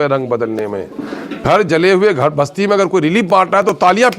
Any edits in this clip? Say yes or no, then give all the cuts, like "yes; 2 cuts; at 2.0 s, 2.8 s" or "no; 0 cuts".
yes; 1 cut; at 1.3 s